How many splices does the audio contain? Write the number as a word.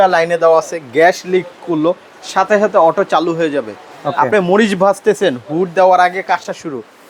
zero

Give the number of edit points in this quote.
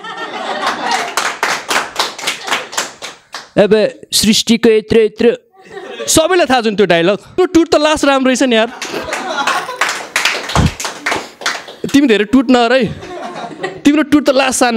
one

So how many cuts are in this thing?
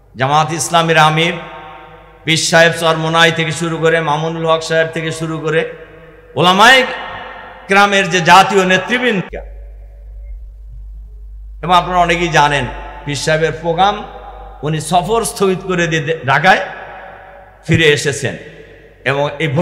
zero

